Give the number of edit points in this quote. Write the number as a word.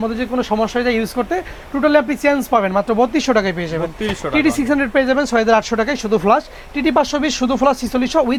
zero